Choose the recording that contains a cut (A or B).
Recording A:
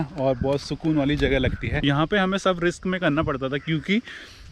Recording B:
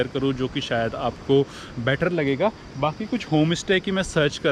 A